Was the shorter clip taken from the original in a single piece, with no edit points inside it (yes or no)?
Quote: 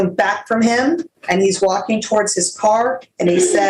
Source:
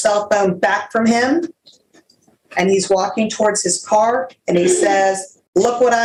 no